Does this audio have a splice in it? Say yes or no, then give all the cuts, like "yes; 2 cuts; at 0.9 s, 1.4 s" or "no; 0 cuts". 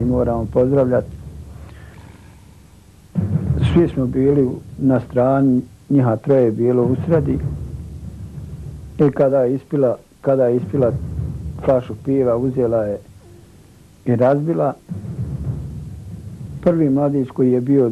no; 0 cuts